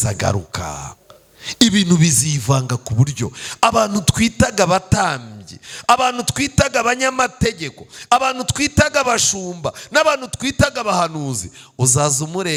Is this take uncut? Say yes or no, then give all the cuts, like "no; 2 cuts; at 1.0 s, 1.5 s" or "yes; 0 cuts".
yes; 0 cuts